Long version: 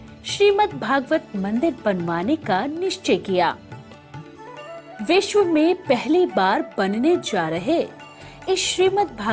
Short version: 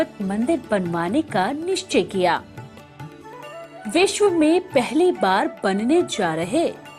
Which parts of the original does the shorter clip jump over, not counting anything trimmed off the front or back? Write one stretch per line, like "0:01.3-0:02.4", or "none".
none